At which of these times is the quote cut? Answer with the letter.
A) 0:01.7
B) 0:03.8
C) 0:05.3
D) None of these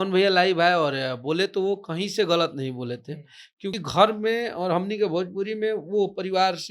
B